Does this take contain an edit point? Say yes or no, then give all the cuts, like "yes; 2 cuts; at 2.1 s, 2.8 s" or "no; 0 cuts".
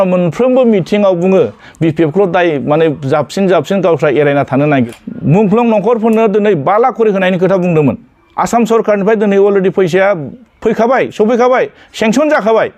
yes; 1 cut; at 4.9 s